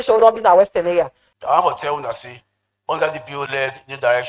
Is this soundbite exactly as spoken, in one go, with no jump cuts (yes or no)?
no